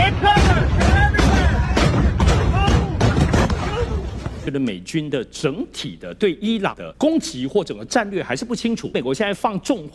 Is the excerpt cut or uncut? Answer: cut